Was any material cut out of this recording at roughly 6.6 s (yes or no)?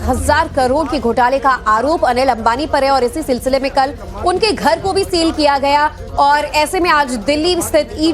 no